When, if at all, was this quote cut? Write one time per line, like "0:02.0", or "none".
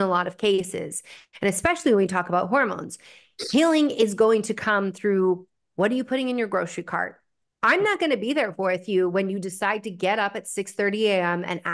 none